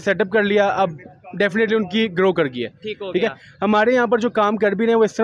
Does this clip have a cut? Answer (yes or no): no